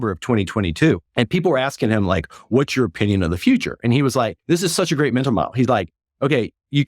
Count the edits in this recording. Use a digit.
2